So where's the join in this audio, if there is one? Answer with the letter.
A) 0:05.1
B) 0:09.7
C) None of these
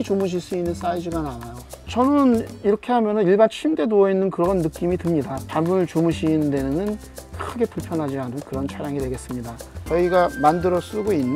B